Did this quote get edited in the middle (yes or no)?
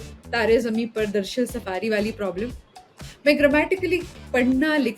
no